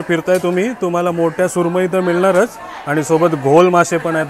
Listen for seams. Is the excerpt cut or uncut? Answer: uncut